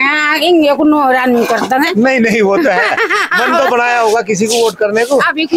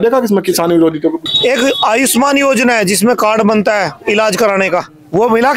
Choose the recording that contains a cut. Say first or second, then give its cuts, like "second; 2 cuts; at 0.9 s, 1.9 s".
second; 1 cut; at 1.2 s